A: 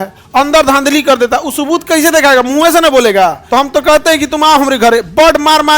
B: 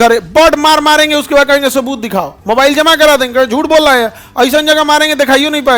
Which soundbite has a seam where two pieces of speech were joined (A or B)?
A